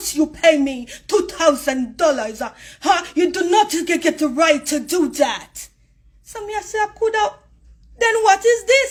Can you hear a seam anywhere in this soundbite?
no; 0 cuts

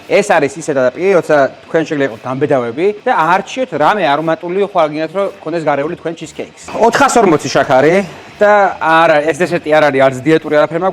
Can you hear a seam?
yes; 2 cuts; at 3.0 s, 6.6 s

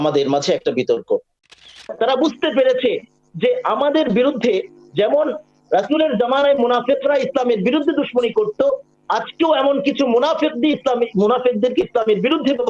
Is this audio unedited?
no; 1 cut; at 1.6 s

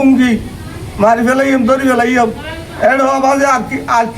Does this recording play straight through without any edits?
yes; 0 cuts

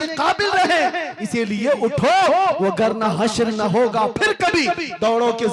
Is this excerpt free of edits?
yes; 0 cuts

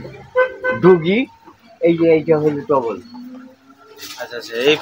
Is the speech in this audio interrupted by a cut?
no; 0 cuts

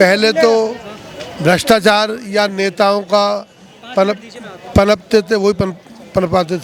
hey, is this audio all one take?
yes; 0 cuts

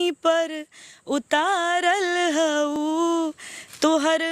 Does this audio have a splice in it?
no; 0 cuts

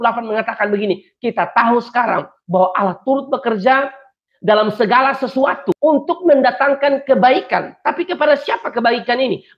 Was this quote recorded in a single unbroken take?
yes; 0 cuts

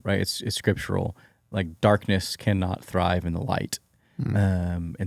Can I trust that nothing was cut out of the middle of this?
yes; 0 cuts

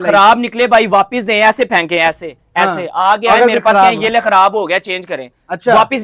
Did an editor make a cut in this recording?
no; 0 cuts

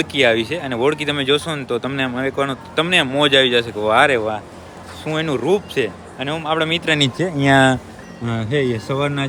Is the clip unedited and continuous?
yes; 0 cuts

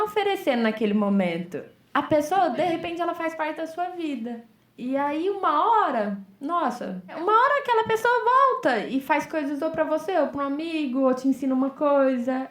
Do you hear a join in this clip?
yes; 1 cut; at 7.2 s

